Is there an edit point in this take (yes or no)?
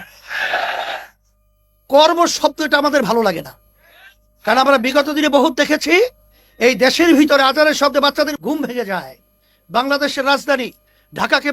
yes